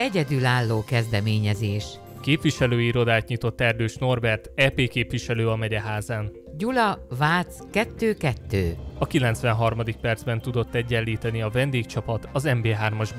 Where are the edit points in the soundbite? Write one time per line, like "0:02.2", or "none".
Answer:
none